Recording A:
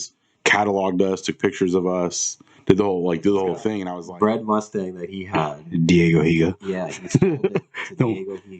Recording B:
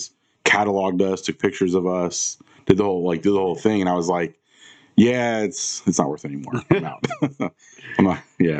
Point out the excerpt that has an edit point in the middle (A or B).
A